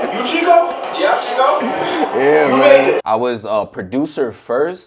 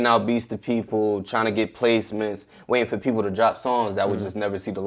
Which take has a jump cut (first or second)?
first